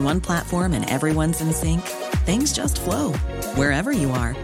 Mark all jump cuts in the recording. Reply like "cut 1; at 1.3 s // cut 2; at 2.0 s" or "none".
none